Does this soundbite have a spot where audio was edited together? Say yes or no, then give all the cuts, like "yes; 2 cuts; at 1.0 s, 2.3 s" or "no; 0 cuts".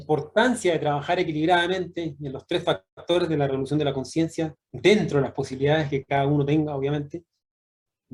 no; 0 cuts